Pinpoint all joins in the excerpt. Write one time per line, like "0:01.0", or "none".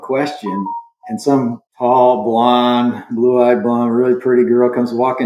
0:01.7